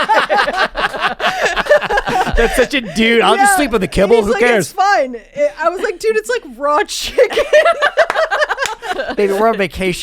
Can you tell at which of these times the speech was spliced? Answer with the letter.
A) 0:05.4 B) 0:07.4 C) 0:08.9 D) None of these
C